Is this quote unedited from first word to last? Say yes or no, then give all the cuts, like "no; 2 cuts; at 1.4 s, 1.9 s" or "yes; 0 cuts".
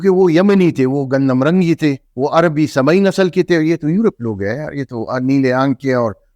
no; 1 cut; at 2.1 s